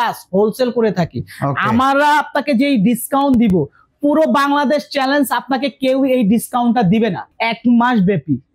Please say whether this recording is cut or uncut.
cut